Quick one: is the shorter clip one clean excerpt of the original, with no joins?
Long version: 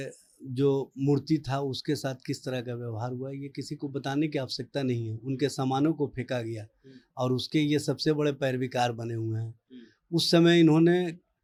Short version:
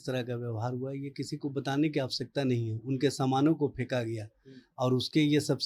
yes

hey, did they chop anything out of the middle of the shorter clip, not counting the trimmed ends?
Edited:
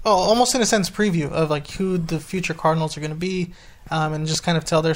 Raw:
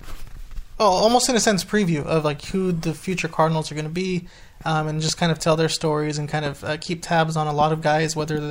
no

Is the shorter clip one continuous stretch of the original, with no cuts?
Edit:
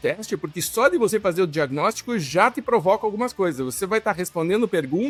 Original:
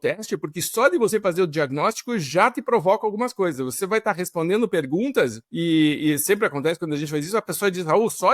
yes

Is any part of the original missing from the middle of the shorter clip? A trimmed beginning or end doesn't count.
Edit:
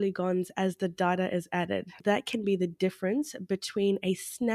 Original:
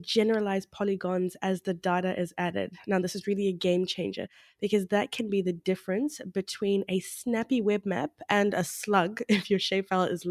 yes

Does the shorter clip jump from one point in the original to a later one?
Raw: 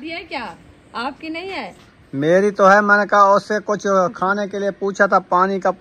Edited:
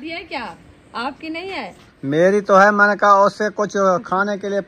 yes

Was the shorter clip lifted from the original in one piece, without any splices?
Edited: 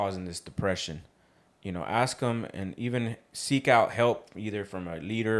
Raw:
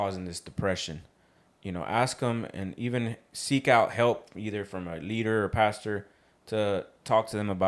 yes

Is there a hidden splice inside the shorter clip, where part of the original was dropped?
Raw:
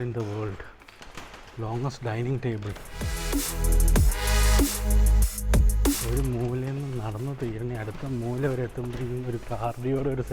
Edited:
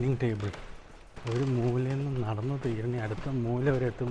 yes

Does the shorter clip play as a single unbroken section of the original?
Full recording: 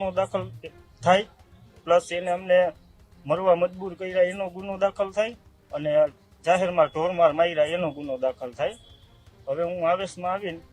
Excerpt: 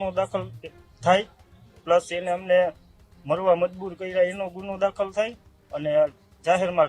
yes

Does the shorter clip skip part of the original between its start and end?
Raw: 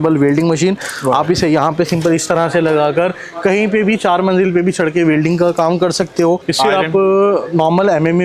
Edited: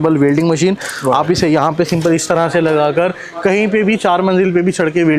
no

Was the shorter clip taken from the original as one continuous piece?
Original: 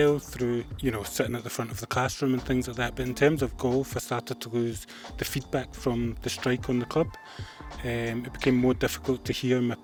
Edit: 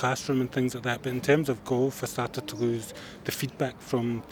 yes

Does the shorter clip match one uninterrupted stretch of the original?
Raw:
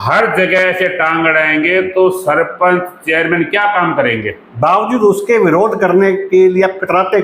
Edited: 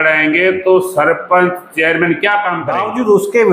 no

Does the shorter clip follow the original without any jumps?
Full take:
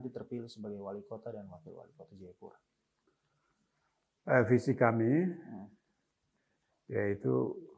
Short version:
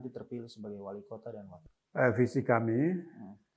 no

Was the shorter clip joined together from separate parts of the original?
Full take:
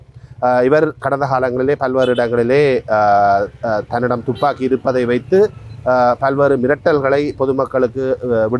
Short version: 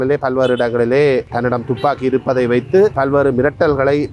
yes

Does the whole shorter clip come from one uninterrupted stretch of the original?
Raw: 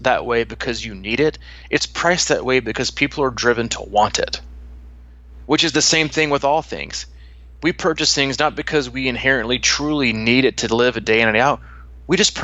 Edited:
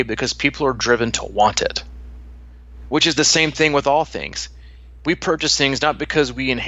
yes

